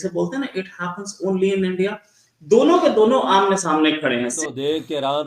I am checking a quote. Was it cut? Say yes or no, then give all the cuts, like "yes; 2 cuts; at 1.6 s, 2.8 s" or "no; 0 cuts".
yes; 1 cut; at 4.4 s